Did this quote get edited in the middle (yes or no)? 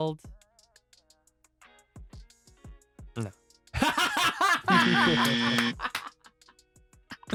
no